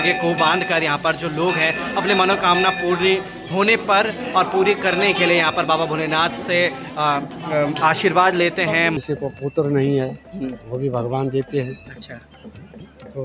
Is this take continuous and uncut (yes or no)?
no